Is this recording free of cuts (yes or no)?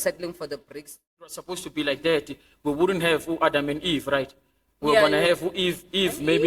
no